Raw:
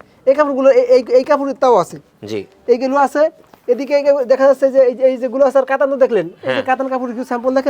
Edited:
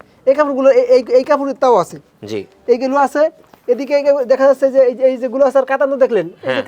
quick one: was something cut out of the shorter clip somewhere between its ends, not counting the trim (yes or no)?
no